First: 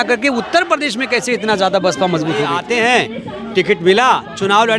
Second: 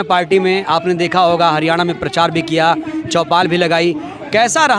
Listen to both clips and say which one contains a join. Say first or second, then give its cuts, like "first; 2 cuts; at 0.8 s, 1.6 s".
first; 1 cut; at 2.6 s